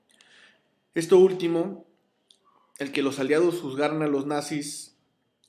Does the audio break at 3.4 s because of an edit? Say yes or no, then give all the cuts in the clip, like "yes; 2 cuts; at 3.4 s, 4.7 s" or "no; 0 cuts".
yes; 1 cut; at 3.4 s